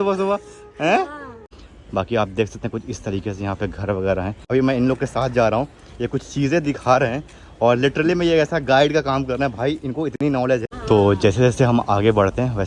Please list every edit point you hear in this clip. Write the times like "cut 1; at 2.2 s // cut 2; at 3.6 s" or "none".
cut 1; at 1.4 s // cut 2; at 4.4 s // cut 3; at 10.7 s

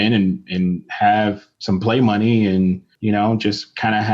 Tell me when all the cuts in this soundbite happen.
cut 1; at 1.5 s // cut 2; at 2.9 s

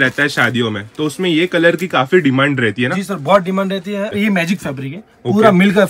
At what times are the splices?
cut 1; at 4.2 s

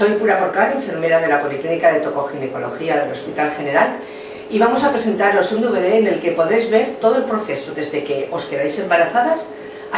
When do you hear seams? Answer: none

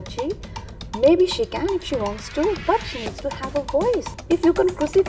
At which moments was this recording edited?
cut 1; at 4.1 s

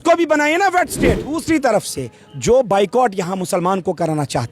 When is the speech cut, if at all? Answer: cut 1; at 1.4 s

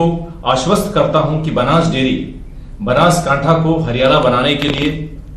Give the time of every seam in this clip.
cut 1; at 1.2 s

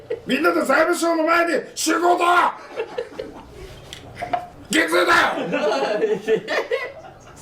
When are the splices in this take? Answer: cut 1; at 4.5 s

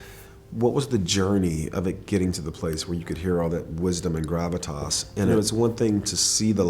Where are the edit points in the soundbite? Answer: cut 1; at 5.3 s

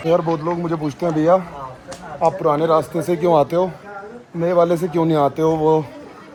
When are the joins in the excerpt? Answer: none

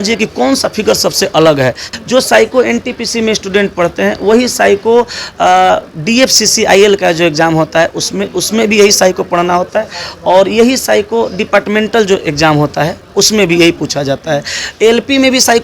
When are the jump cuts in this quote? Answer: cut 1; at 1.8 s

